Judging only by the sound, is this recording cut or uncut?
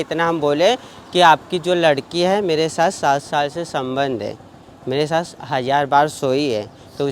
uncut